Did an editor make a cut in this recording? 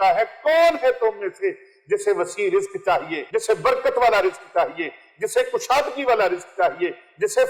yes; 1 cut; at 3.2 s

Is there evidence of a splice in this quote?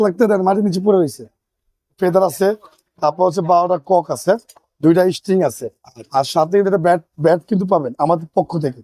yes; 1 cut; at 1.9 s

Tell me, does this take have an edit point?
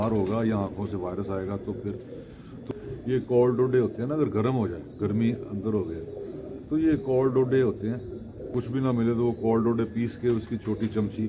yes; 2 cuts; at 2.7 s, 8.5 s

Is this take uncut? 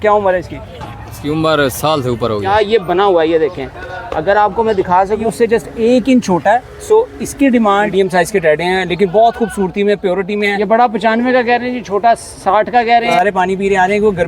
no; 5 cuts; at 2.4 s, 5.2 s, 7.9 s, 10.5 s, 13.2 s

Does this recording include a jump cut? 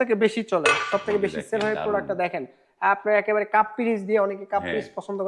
no; 0 cuts

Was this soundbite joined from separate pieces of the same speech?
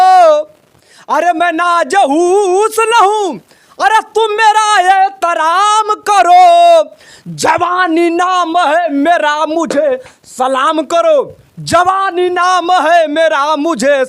no; 0 cuts

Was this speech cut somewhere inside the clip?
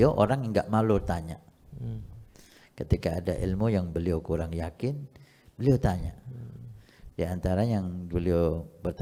no; 0 cuts

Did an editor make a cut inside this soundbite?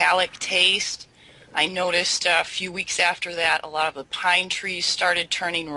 yes; 1 cut; at 1.5 s

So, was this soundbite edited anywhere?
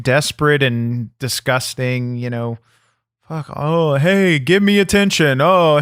no; 0 cuts

